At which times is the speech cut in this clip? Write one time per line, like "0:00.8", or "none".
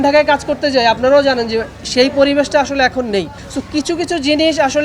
none